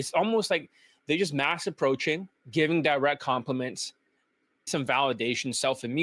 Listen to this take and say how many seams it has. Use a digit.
0